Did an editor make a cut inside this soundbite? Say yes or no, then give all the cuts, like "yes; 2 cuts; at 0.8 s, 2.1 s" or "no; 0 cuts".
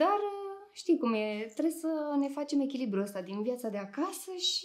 no; 0 cuts